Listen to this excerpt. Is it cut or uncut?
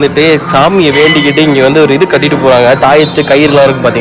uncut